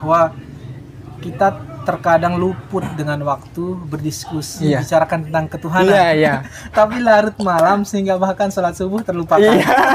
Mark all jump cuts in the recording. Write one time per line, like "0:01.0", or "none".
none